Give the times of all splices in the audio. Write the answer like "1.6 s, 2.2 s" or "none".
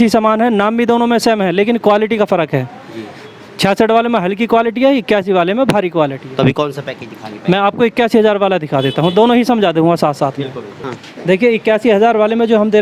none